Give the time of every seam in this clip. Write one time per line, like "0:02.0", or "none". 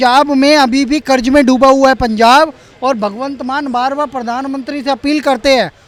none